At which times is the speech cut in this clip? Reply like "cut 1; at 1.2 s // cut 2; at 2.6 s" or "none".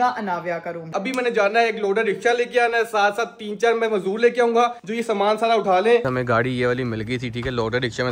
cut 1; at 0.9 s // cut 2; at 6.0 s